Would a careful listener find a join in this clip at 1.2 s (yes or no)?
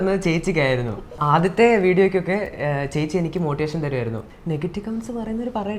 yes